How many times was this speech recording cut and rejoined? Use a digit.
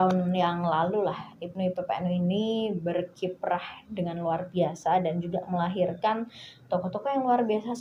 0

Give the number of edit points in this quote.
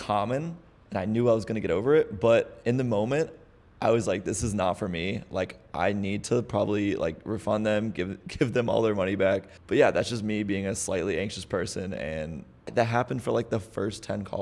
2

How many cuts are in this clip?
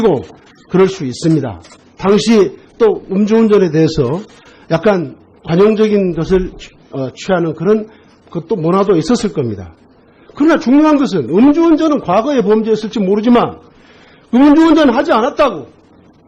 0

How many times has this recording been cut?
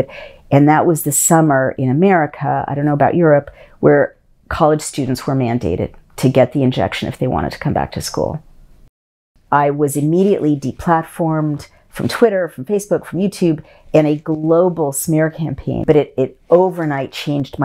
2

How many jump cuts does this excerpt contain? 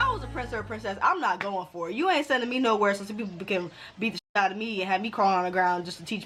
0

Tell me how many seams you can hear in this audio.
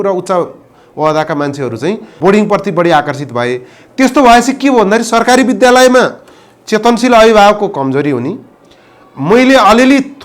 1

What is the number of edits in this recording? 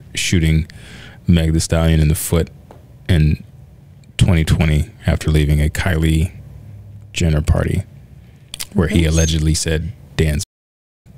0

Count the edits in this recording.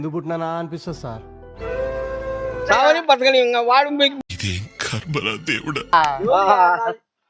1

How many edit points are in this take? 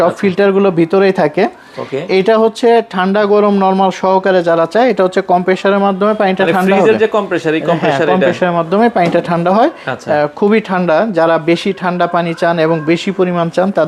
0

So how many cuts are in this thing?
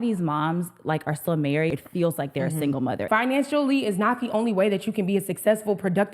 2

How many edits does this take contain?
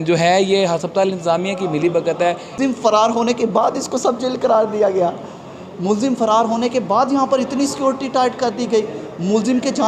1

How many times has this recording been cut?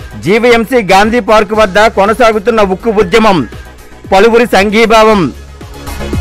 0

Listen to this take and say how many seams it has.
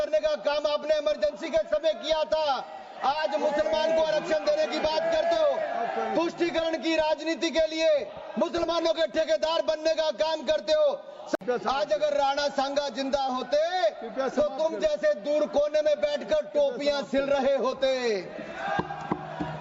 1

